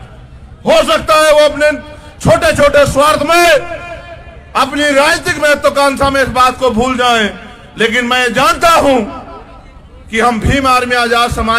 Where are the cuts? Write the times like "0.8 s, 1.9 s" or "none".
none